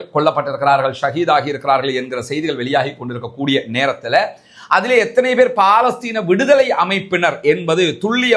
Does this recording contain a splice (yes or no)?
no